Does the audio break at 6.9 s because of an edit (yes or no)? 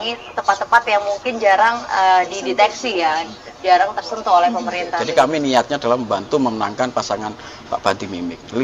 no